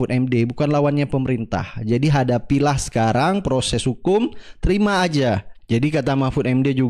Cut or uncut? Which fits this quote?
cut